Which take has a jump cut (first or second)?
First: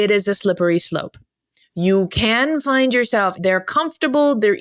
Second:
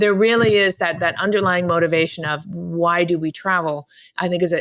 first